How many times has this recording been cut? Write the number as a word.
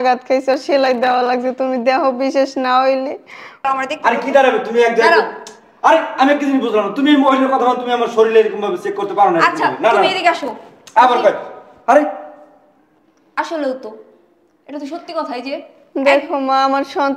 two